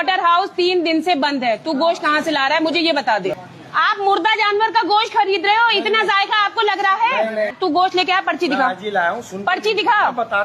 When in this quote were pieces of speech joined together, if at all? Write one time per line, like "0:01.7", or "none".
0:03.5
0:07.5